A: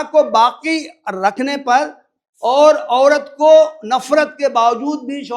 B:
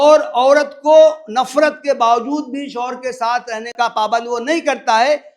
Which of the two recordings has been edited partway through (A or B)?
B